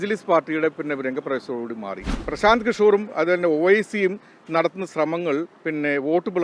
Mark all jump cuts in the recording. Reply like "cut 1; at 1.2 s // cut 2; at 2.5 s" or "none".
cut 1; at 2.2 s